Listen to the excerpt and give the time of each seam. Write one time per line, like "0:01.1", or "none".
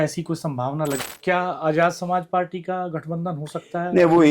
0:01.0